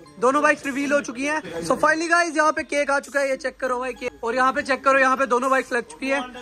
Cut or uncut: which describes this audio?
cut